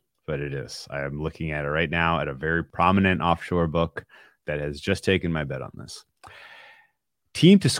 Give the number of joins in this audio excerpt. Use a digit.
2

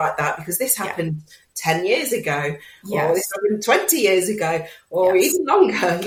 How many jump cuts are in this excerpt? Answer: 0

